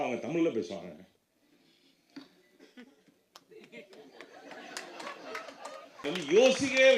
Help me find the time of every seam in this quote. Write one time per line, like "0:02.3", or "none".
0:06.0